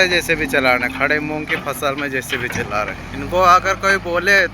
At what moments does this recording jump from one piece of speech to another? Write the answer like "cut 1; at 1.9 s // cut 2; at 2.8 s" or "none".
cut 1; at 3.0 s